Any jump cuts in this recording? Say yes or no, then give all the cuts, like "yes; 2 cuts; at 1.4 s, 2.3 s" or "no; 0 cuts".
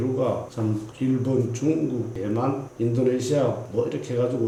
no; 0 cuts